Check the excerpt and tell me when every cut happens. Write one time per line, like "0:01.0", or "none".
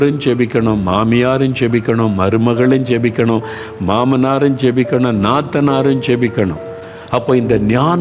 0:06.7